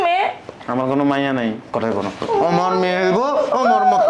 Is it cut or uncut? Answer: cut